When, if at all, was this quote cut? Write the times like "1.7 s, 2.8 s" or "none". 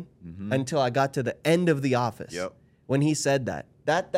none